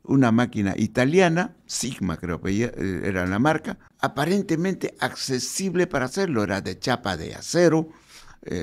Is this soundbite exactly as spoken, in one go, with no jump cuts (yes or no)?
no